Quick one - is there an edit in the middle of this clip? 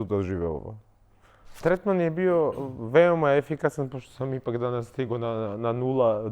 yes; 1 cut; at 1.6 s

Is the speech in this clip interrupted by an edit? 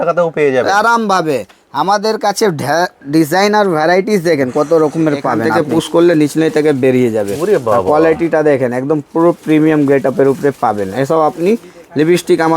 yes; 1 cut; at 5.5 s

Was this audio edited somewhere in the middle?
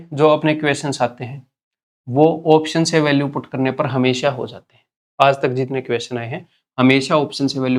no; 0 cuts

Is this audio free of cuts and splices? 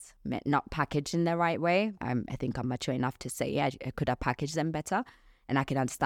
no; 1 cut; at 2.0 s

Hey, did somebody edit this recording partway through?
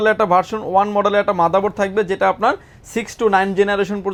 no; 0 cuts

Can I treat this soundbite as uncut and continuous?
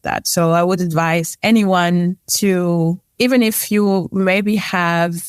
no; 3 cuts; at 1.3 s, 2.2 s, 3.0 s

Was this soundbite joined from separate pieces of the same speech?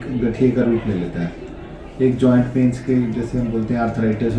no; 0 cuts

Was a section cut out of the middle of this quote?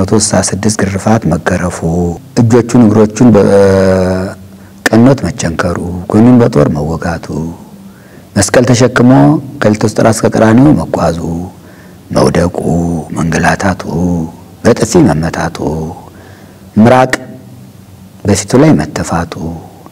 yes; 1 cut; at 2.2 s

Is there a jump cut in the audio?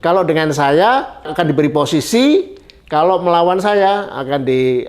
yes; 1 cut; at 1.3 s

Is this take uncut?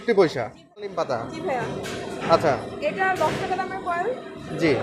no; 1 cut; at 1.0 s

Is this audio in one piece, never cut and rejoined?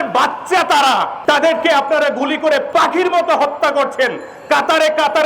no; 2 cuts; at 1.1 s, 2.7 s

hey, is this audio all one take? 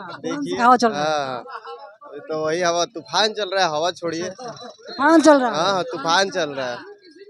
yes; 0 cuts

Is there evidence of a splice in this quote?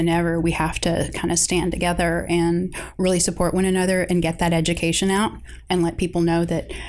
no; 0 cuts

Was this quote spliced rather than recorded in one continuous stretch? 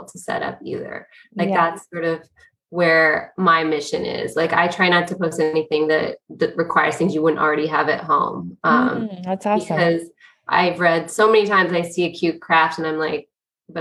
no; 0 cuts

